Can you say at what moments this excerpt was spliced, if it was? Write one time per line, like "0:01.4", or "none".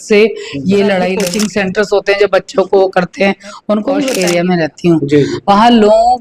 0:01.2
0:04.1